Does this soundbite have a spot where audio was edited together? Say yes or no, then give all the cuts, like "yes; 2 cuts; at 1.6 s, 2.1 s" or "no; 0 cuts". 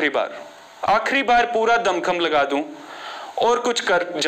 no; 0 cuts